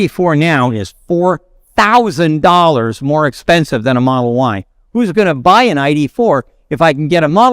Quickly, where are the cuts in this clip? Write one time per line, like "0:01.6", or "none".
0:04.8

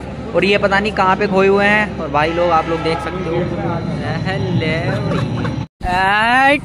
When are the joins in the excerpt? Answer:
0:05.7

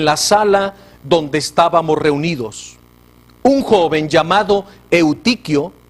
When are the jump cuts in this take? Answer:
0:03.6

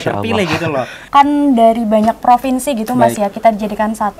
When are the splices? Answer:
0:01.0

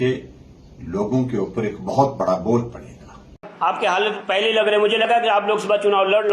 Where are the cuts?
0:03.5

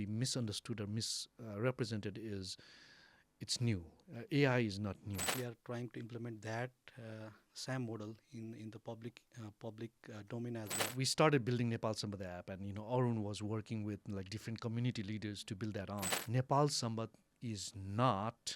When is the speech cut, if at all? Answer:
0:05.3
0:10.8
0:16.2

